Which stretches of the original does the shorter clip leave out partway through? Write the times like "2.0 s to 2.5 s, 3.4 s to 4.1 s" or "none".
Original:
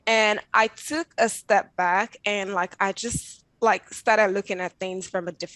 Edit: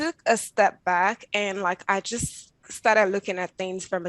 3.5 s to 3.8 s